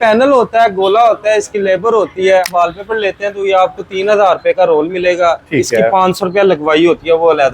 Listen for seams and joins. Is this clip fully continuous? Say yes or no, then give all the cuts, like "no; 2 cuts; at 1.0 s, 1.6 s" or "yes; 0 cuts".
no; 1 cut; at 2.7 s